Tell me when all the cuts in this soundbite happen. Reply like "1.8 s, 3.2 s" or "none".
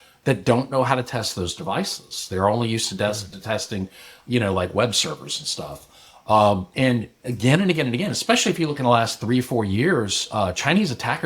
none